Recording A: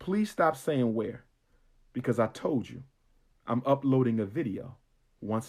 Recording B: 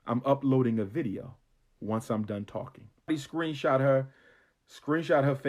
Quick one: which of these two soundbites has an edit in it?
B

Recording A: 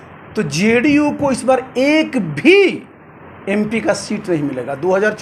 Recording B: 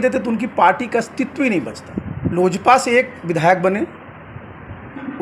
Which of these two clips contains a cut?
B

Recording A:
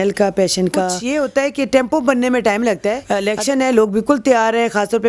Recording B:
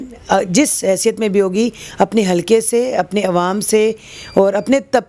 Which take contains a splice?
A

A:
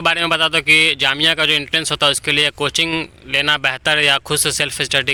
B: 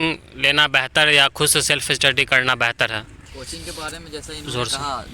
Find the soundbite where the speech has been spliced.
B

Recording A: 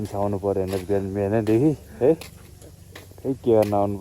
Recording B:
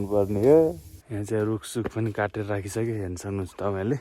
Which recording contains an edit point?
B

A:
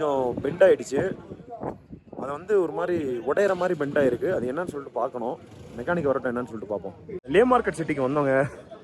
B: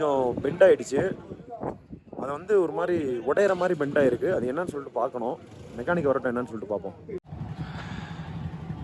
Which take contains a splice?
A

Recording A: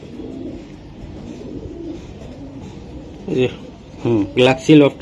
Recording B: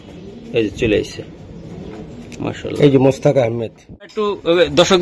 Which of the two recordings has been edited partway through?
B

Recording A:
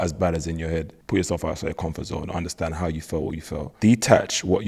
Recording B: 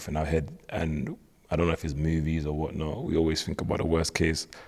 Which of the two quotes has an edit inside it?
A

